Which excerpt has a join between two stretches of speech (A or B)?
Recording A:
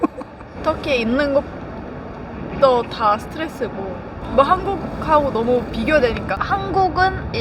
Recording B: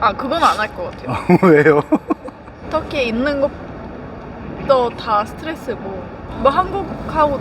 A